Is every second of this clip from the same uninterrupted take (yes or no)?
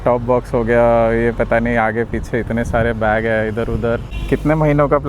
no